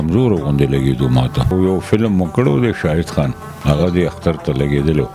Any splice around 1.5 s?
yes; 1 cut; at 1.5 s

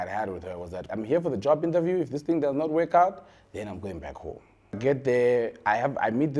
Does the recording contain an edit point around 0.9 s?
yes; 2 cuts; at 0.9 s, 4.8 s

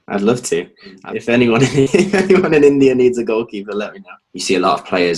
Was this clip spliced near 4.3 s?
yes; 2 cuts; at 1.0 s, 4.3 s

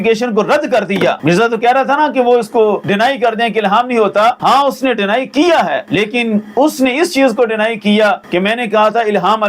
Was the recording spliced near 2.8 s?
yes; 5 cuts; at 1.2 s, 2.8 s, 4.4 s, 5.8 s, 8.2 s

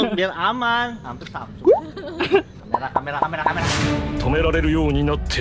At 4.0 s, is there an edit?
no; 1 cut; at 2.6 s

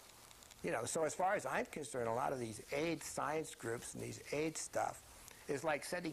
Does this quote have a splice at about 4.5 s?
yes; 1 cut; at 4.5 s

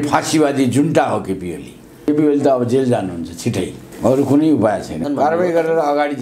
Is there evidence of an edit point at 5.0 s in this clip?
yes; 3 cuts; at 2.1 s, 3.8 s, 5.0 s

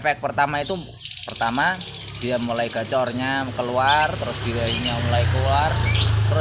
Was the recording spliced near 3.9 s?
no; 0 cuts

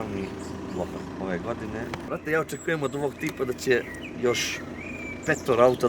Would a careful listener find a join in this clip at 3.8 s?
no; 2 cuts; at 1.1 s, 2.0 s

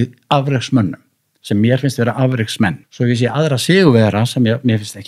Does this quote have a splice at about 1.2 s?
no; 1 cut; at 2.8 s

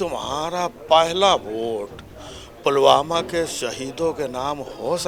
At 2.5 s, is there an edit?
no; 0 cuts

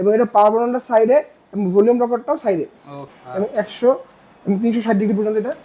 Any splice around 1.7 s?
no; 1 cut; at 3.0 s

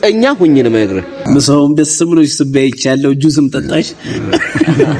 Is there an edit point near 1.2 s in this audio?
yes; 1 cut; at 1.2 s

